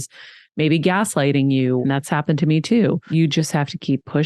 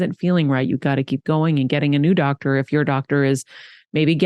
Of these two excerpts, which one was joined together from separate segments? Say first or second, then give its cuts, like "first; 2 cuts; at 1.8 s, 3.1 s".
first; 2 cuts; at 1.8 s, 3.1 s